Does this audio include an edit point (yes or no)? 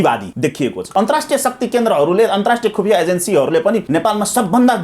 yes